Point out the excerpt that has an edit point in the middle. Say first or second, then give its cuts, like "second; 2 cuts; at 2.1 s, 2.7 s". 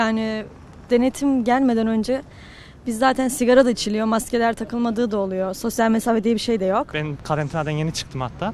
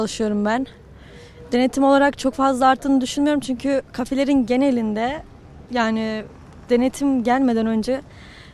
first; 1 cut; at 6.9 s